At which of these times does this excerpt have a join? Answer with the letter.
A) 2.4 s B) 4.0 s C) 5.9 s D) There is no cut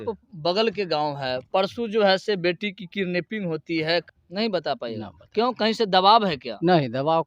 B